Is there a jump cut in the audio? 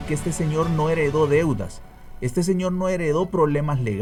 no; 0 cuts

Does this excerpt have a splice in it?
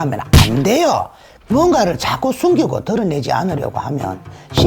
yes; 1 cut; at 1.3 s

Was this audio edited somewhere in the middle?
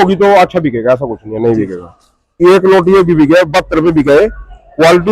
yes; 1 cut; at 2.3 s

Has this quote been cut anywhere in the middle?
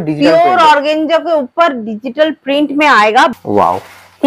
yes; 1 cut; at 3.3 s

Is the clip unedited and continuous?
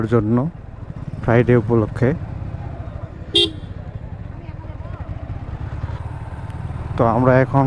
no; 1 cut; at 6.0 s

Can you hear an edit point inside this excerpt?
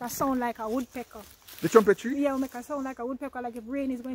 no; 0 cuts

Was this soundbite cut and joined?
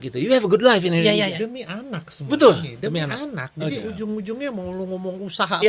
yes; 1 cut; at 1.3 s

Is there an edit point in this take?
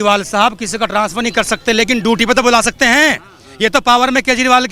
no; 0 cuts

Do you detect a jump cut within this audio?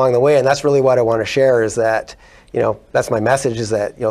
no; 0 cuts

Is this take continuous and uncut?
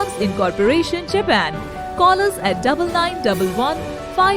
yes; 0 cuts

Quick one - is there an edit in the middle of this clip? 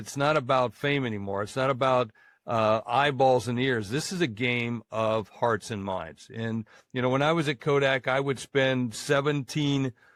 no; 0 cuts

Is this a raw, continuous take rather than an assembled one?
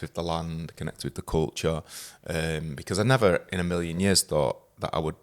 yes; 0 cuts

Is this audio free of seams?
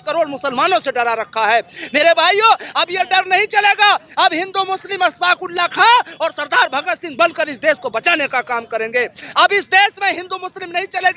yes; 0 cuts

